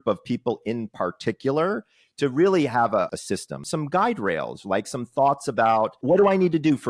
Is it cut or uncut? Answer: cut